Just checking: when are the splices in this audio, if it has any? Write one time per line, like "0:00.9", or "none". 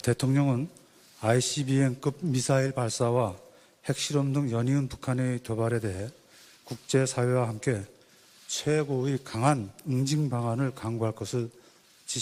none

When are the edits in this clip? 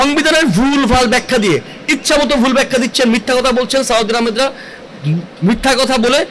none

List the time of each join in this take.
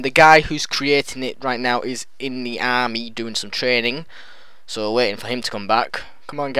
0:02.1

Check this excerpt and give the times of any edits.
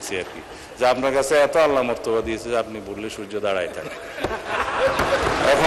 none

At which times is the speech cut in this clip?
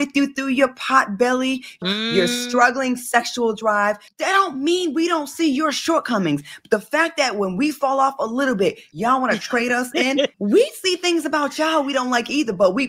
0:01.8
0:04.1
0:08.9
0:10.3

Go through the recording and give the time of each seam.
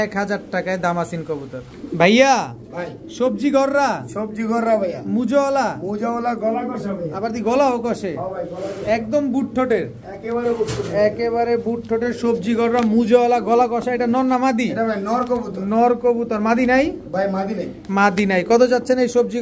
none

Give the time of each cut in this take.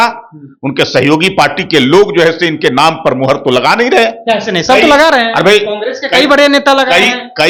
none

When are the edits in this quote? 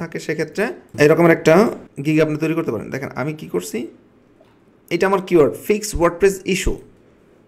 0:00.9
0:01.9

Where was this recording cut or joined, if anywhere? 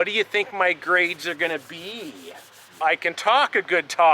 0:02.8

